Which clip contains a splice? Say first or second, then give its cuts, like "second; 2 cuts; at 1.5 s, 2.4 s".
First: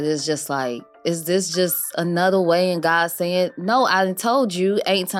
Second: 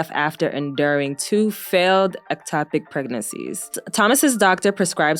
second; 1 cut; at 3.8 s